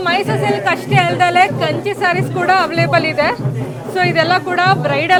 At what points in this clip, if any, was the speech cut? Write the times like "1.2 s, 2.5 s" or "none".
none